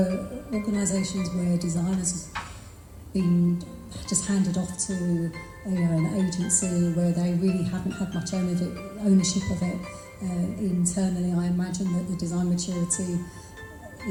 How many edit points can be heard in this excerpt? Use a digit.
0